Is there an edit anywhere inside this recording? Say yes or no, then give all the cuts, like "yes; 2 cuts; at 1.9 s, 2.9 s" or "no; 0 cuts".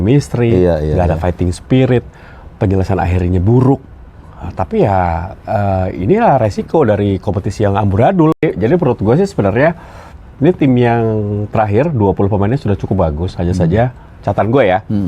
yes; 1 cut; at 8.4 s